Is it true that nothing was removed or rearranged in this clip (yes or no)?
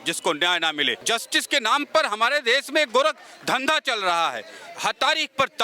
no